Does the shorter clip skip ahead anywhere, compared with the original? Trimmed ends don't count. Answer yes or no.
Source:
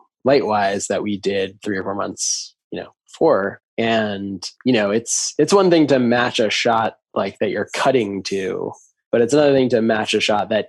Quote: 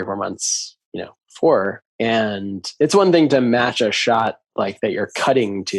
yes